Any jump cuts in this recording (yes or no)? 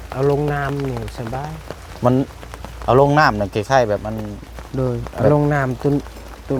no